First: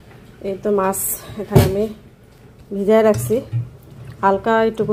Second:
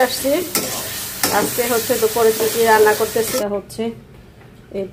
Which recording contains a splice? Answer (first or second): second